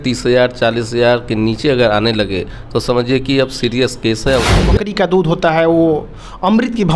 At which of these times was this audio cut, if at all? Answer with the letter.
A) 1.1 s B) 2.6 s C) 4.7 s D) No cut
C